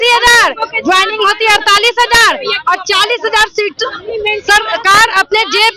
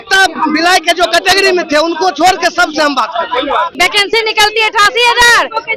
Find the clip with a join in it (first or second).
second